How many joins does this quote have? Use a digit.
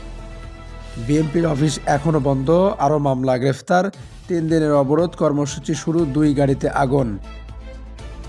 2